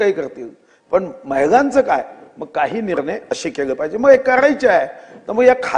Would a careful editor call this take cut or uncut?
uncut